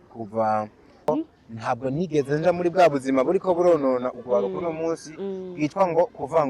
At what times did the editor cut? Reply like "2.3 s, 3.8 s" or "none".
1.1 s